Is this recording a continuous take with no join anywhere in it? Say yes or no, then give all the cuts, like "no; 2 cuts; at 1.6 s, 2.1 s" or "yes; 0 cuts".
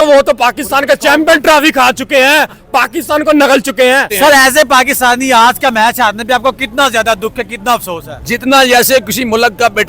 no; 1 cut; at 4.0 s